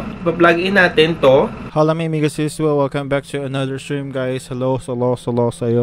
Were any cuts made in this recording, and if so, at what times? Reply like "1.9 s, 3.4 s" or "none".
1.6 s